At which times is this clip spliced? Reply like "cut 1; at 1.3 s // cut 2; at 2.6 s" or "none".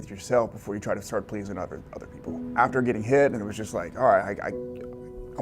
cut 1; at 2.4 s // cut 2; at 3.5 s